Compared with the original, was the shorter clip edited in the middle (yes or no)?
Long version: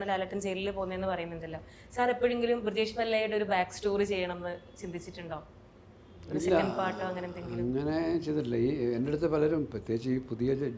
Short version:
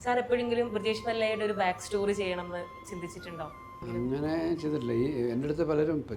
yes